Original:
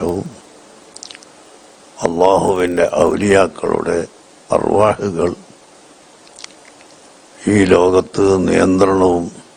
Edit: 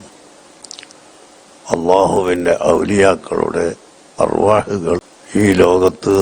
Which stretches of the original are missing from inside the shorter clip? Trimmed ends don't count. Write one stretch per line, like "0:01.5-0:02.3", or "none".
0:05.5-0:07.3